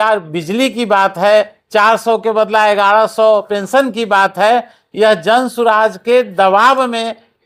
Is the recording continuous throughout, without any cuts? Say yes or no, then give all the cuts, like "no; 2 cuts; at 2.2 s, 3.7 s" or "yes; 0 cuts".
yes; 0 cuts